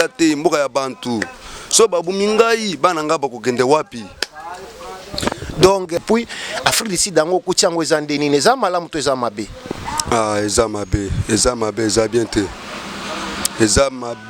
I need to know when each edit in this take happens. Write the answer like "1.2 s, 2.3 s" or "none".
6.0 s